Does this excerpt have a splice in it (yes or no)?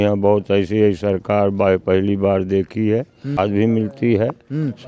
yes